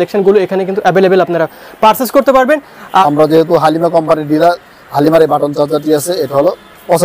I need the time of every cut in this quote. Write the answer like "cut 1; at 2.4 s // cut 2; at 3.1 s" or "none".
cut 1; at 3.0 s